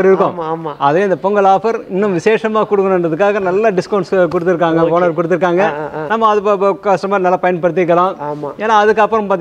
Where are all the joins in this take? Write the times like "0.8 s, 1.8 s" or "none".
none